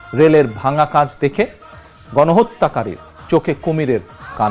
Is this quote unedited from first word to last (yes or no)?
yes